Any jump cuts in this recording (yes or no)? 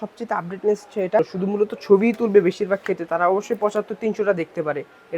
yes